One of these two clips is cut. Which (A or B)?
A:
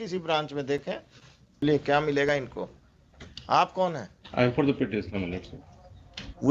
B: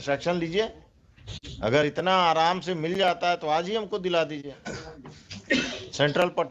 A